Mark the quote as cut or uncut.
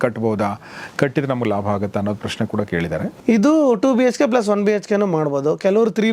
cut